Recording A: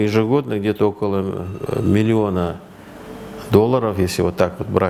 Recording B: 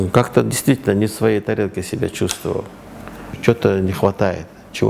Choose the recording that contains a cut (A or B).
B